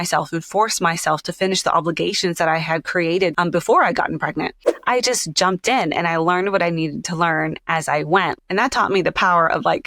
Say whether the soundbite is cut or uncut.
cut